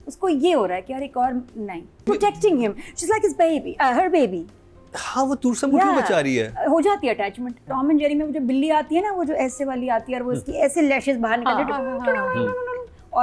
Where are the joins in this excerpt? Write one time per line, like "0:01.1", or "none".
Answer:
0:02.0
0:07.6